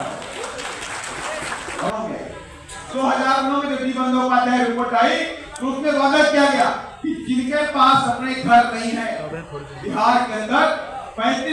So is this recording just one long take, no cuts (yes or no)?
no